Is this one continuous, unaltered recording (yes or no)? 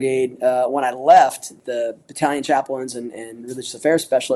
no